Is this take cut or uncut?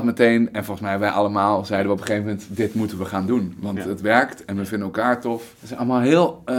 cut